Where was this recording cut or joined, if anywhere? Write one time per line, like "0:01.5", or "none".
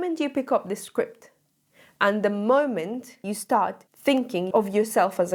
none